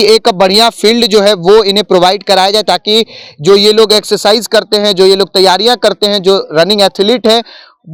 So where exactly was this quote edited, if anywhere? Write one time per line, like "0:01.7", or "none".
none